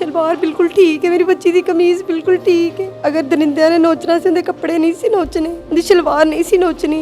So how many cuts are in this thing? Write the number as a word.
two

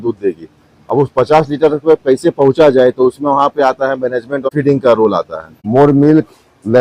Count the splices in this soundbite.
two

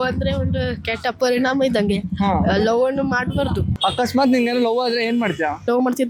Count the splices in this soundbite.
zero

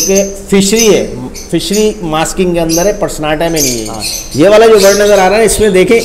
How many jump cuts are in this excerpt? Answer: one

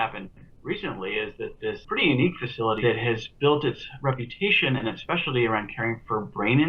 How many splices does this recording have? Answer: two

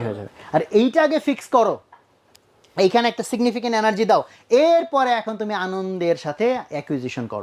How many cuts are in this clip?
zero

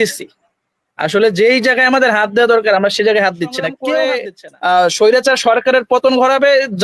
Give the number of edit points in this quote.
one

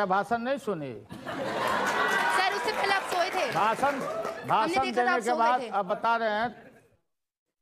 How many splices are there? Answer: zero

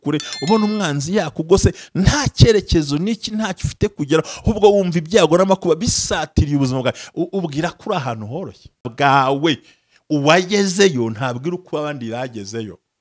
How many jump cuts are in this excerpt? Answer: one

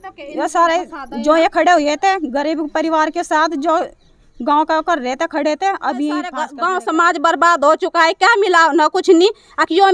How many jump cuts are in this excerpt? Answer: one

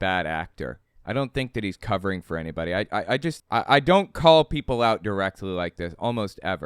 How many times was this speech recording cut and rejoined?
one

